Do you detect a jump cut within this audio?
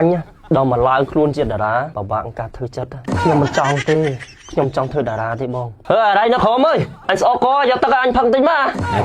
yes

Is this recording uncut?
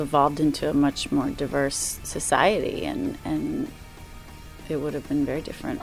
no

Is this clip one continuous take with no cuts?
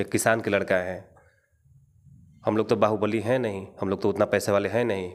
yes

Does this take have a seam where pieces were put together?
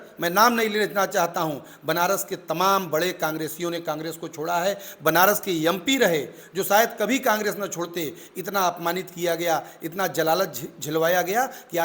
no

